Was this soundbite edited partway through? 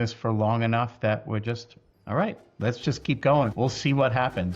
yes; 1 cut; at 3.5 s

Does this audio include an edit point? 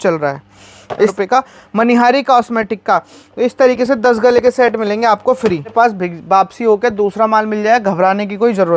yes; 2 cuts; at 1.1 s, 5.7 s

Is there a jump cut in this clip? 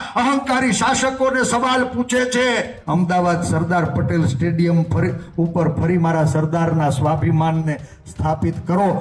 yes; 1 cut; at 2.8 s

